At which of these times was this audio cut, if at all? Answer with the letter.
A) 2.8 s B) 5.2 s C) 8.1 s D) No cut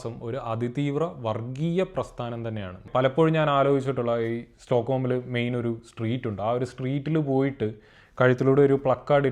A